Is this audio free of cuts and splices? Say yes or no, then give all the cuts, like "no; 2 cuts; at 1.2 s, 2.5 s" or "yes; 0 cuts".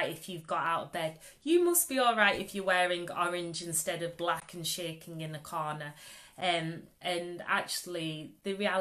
yes; 0 cuts